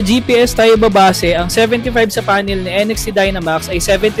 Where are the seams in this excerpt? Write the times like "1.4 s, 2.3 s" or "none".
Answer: none